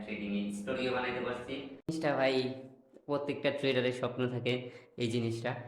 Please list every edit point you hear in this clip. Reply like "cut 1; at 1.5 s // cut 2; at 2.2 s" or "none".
cut 1; at 1.9 s